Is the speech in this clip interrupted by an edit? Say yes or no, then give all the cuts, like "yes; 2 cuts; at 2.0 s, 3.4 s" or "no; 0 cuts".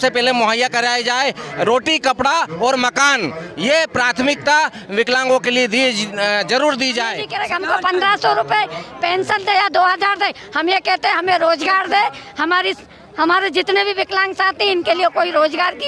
yes; 1 cut; at 7.3 s